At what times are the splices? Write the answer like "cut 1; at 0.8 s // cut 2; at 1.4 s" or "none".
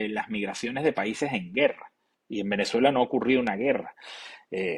none